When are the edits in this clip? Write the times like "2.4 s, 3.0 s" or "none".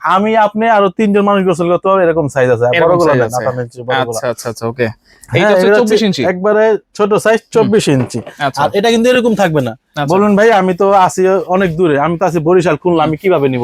none